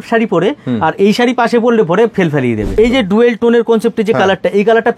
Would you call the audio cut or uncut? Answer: cut